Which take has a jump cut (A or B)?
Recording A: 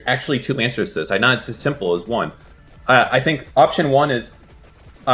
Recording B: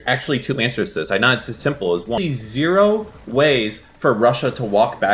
B